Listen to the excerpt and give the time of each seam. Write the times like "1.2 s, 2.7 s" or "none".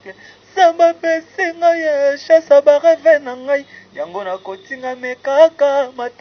none